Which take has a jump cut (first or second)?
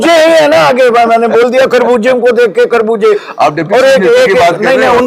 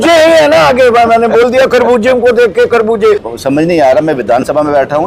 second